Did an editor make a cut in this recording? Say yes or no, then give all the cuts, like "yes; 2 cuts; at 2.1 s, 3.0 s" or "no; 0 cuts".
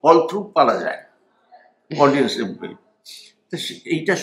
no; 0 cuts